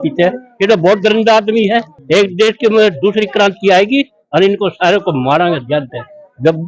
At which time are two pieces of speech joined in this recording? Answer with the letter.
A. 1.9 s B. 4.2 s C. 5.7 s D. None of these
A